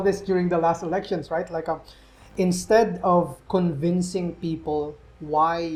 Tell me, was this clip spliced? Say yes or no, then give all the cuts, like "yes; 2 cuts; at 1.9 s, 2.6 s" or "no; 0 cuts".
no; 0 cuts